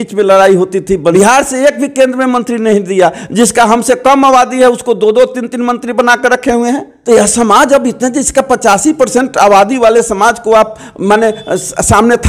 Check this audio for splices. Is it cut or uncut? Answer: cut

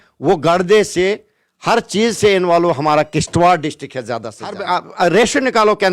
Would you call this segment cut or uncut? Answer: cut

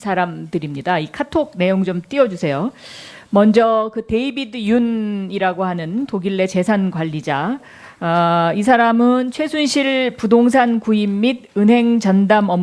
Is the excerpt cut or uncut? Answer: cut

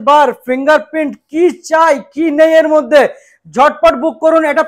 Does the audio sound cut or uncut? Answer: uncut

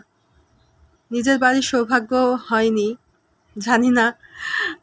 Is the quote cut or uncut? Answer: uncut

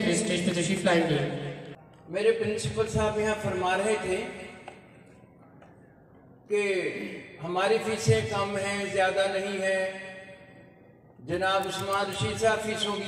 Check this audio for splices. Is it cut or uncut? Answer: cut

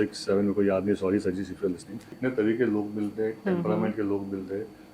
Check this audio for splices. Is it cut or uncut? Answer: cut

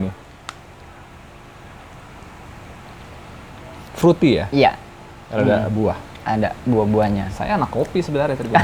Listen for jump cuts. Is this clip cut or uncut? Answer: uncut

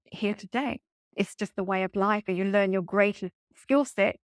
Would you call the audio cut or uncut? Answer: cut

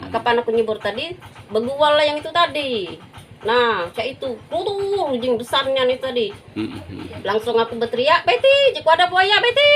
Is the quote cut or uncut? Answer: uncut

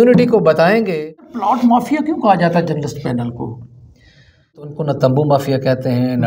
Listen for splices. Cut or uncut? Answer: cut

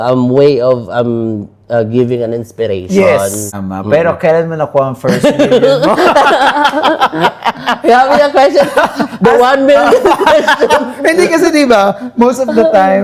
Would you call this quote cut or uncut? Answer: cut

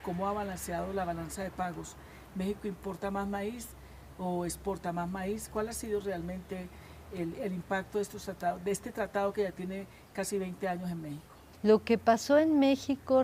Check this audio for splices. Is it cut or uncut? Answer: cut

